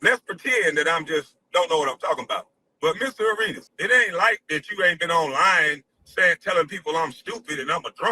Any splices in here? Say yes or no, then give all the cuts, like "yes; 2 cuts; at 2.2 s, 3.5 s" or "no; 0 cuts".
yes; 1 cut; at 3.7 s